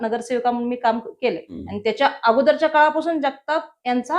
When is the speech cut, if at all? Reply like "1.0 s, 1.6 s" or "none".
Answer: 1.6 s